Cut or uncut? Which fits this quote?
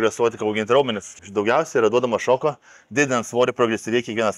cut